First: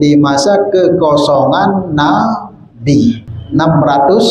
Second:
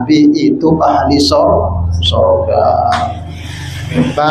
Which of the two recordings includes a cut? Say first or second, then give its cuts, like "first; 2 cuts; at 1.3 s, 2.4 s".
first; 1 cut; at 3.3 s